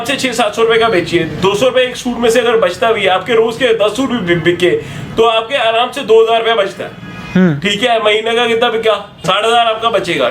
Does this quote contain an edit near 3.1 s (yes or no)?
no